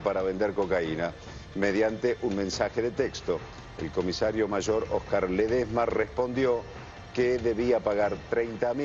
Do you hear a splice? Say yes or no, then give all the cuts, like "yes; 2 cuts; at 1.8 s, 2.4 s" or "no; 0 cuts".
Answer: no; 0 cuts